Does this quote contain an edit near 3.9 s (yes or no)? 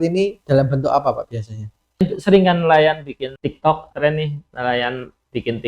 yes